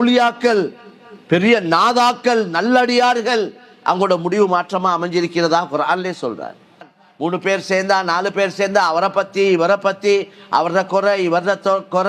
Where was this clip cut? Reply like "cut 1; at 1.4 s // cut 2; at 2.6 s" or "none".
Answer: cut 1; at 7.0 s